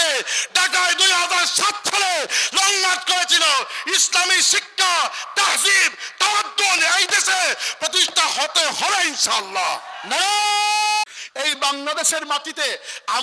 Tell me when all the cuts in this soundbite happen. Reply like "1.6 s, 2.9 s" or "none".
11.2 s